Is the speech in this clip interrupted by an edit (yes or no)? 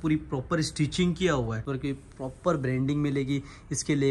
yes